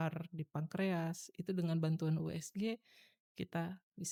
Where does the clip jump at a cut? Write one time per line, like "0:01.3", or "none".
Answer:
none